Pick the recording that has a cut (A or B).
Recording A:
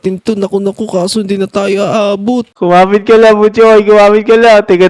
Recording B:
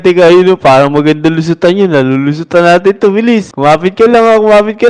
A